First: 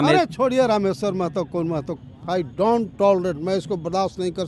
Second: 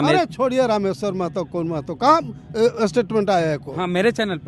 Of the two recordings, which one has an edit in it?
first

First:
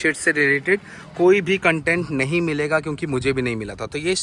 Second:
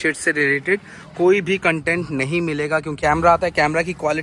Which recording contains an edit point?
second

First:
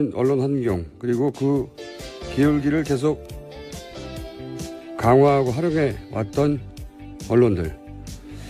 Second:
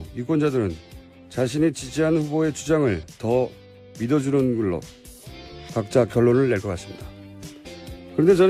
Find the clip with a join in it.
second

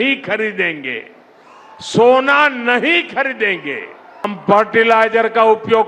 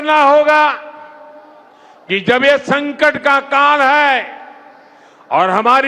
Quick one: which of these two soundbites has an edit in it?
first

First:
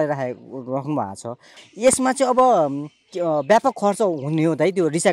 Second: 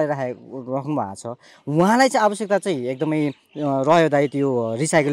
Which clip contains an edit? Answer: first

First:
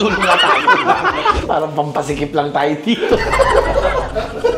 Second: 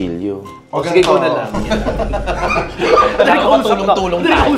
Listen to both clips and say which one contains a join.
first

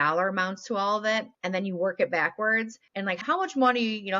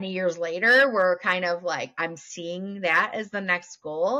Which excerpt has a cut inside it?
first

